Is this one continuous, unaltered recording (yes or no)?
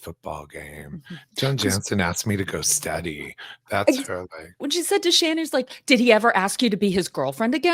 no